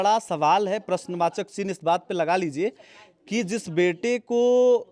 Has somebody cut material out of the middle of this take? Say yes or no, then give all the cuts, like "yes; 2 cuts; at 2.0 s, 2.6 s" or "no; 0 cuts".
no; 0 cuts